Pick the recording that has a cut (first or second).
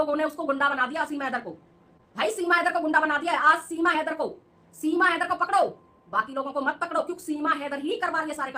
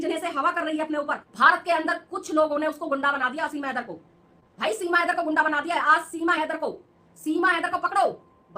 second